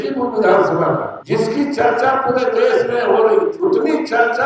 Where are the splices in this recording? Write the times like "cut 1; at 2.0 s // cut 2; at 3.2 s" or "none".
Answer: cut 1; at 1.1 s // cut 2; at 3.6 s